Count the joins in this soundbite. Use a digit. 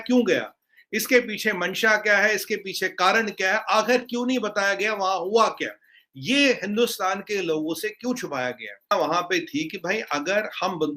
1